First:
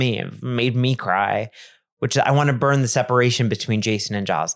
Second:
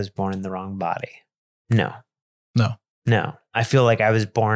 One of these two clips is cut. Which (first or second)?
second